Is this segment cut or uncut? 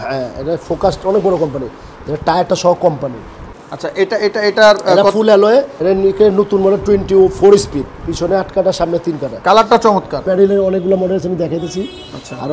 cut